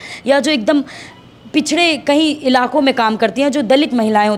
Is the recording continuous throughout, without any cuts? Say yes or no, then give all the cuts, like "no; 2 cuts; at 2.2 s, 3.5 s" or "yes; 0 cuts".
yes; 0 cuts